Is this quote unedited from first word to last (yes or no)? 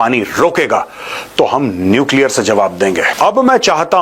no